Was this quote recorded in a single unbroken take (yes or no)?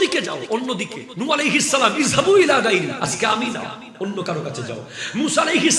no